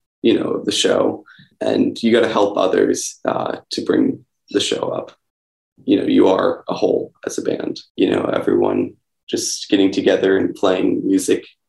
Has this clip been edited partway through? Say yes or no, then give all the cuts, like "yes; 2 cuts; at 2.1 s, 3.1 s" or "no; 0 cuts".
yes; 1 cut; at 7.8 s